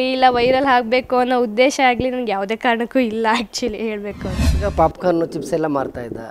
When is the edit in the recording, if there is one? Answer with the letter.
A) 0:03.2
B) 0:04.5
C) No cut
B